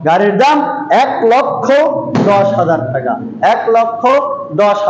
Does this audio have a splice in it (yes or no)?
no